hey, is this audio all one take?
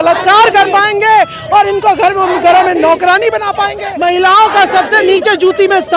no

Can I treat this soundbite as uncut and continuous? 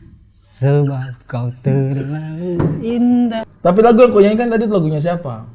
no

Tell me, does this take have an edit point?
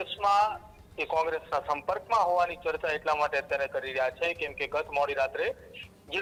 no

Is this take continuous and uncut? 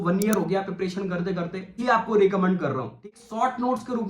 no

